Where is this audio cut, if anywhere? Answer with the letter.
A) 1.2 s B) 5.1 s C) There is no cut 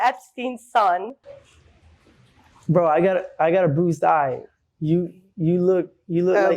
A